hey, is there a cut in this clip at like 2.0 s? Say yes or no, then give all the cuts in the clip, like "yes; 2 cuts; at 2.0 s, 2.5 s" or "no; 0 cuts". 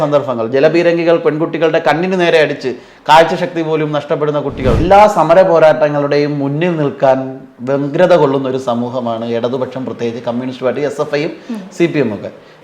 no; 1 cut; at 4.8 s